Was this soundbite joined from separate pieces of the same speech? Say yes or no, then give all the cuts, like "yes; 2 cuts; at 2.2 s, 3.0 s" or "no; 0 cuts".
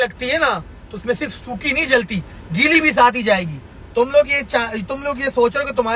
no; 0 cuts